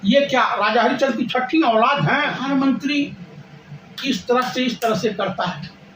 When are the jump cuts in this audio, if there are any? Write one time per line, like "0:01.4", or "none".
0:02.4